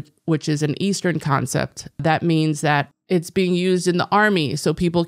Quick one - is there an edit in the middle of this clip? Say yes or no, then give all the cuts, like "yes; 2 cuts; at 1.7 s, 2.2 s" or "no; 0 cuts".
yes; 2 cuts; at 2.0 s, 3.0 s